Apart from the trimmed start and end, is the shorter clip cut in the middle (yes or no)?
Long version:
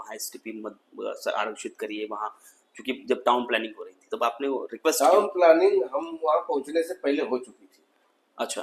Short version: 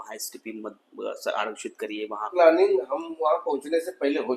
yes